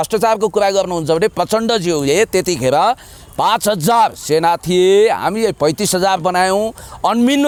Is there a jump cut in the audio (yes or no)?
no